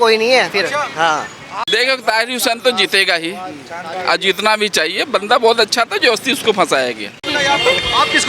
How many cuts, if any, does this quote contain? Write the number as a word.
two